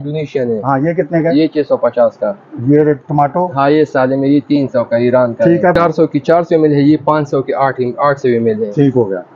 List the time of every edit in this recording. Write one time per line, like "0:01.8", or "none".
0:05.8